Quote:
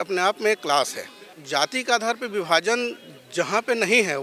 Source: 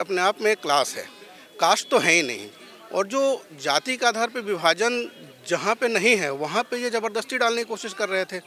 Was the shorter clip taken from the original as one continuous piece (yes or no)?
no